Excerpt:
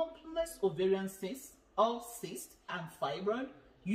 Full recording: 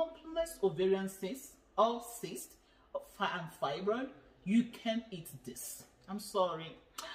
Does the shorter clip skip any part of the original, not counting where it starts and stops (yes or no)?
yes